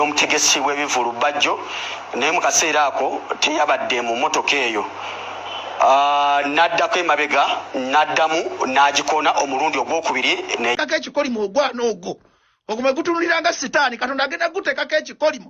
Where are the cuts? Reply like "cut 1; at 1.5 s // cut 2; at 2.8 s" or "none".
cut 1; at 10.8 s